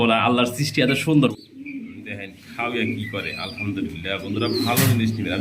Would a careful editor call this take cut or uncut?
cut